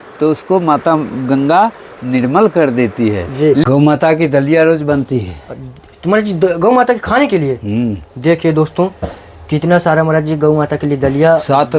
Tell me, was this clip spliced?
yes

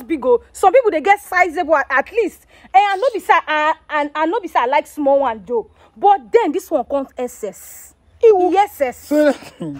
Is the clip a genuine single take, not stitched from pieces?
yes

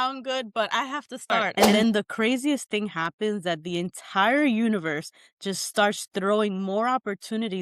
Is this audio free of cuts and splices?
no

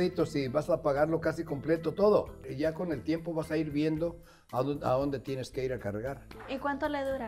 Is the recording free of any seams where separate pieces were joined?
no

